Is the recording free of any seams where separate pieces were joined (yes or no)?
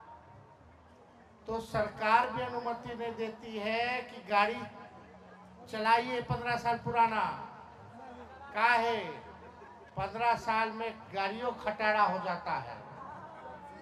yes